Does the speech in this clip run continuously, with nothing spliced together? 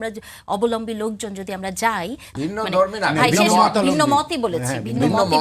no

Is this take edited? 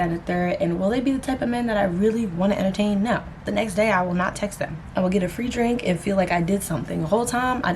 yes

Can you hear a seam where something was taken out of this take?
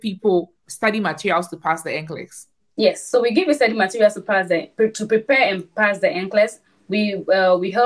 no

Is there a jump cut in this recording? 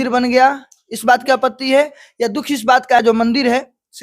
yes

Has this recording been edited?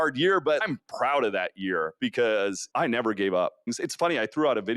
yes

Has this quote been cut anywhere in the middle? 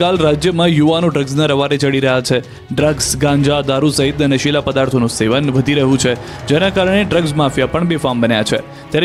no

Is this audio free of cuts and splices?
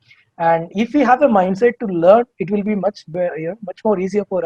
yes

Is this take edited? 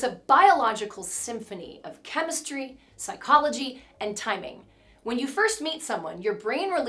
no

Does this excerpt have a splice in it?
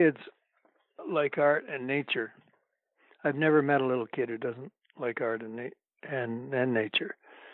yes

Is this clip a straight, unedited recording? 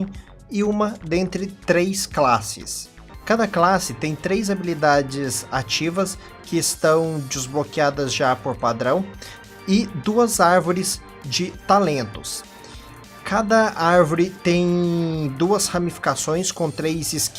no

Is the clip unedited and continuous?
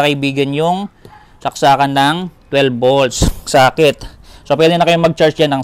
yes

